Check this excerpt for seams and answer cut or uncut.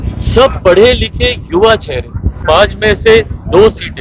cut